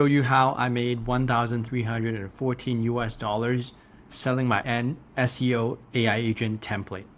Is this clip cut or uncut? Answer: cut